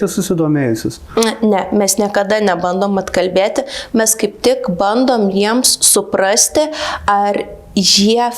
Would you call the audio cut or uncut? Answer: uncut